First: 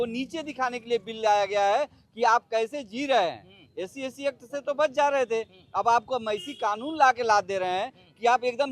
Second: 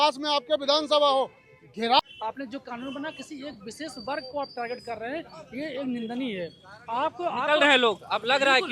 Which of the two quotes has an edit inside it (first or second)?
second